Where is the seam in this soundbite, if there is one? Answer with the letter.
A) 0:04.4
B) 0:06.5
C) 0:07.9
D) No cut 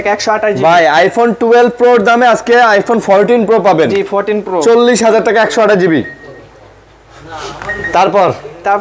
D